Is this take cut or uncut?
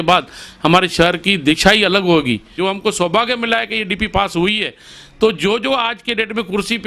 cut